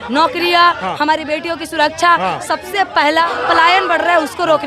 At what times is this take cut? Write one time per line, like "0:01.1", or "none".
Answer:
0:03.3

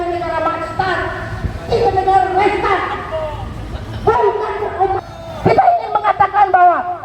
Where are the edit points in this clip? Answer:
0:05.0

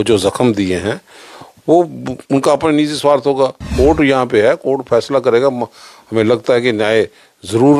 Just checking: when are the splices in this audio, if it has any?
0:03.6

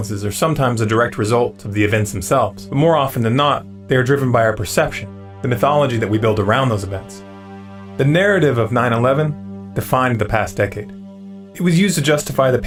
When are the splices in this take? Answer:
none

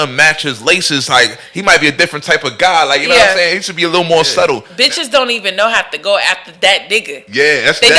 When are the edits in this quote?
0:04.7

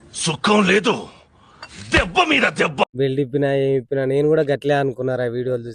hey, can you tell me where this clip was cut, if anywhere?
0:02.8

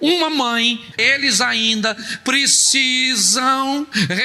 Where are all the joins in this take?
0:01.0

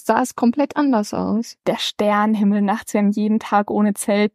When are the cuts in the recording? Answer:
0:01.6

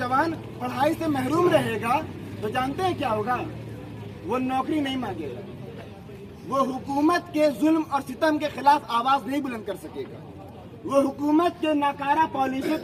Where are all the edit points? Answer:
none

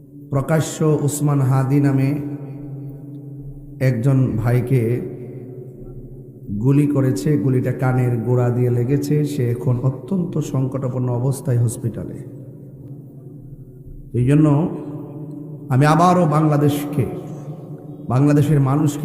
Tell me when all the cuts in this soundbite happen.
0:12.9

